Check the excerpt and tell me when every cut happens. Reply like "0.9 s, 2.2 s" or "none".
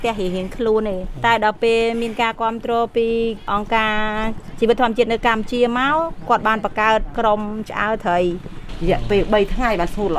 1.1 s, 3.5 s, 7.1 s, 8.7 s